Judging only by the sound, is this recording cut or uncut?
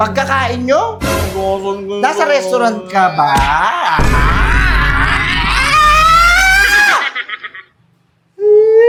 uncut